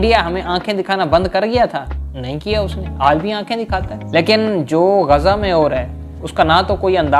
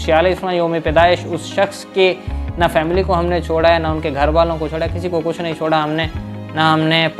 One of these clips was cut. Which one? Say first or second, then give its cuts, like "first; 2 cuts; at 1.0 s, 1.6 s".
first; 1 cut; at 3.9 s